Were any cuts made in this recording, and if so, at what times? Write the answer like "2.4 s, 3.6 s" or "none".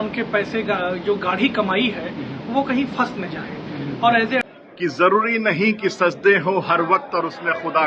4.4 s